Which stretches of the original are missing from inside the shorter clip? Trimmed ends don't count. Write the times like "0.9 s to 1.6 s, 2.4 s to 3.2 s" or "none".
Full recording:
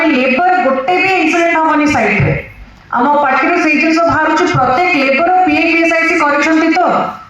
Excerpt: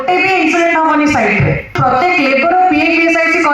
2.6 s to 4.5 s